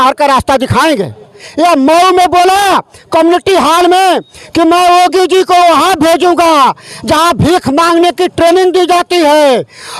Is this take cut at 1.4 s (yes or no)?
yes